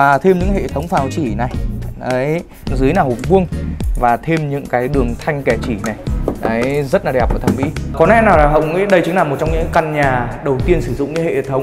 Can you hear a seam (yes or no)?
yes